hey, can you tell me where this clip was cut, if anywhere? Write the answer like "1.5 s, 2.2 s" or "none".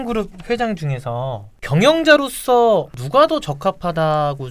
1.5 s, 3.0 s